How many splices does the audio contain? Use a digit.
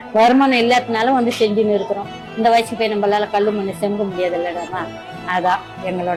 0